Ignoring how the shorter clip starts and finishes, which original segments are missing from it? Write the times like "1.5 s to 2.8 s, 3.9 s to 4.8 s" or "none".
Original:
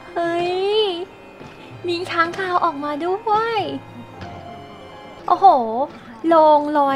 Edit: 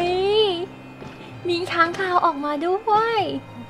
none